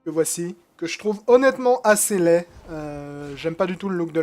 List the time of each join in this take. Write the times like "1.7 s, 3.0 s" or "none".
3.3 s